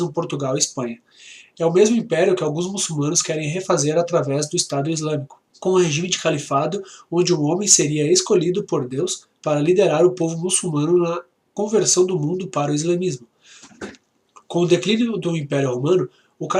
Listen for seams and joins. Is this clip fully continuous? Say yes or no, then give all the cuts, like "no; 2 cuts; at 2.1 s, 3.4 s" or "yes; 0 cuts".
no; 1 cut; at 7.3 s